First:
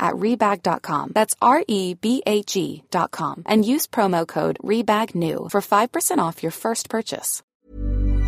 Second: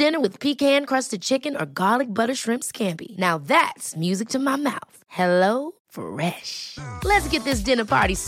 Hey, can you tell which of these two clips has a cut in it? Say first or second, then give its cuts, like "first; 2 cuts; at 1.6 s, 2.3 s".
first; 1 cut; at 7.4 s